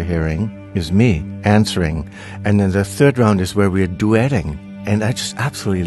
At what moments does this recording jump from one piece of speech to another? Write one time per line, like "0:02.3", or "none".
0:02.9
0:03.9